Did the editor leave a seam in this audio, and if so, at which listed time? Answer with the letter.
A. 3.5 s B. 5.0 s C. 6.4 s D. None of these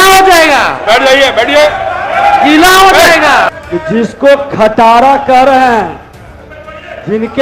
A